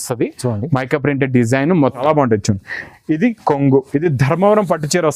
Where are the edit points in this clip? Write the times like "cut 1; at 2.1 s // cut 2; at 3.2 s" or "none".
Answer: cut 1; at 2.0 s